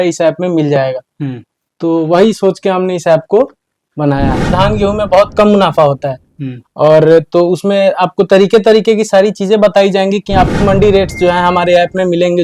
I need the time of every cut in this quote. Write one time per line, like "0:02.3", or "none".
0:04.5
0:10.5